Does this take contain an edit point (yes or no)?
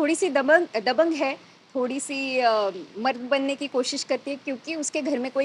no